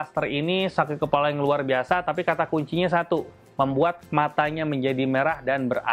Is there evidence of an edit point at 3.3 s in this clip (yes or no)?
no